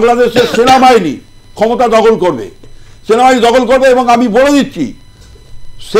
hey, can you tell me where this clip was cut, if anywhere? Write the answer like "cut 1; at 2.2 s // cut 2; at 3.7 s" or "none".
cut 1; at 2.6 s